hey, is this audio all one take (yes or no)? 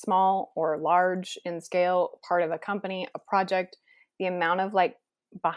yes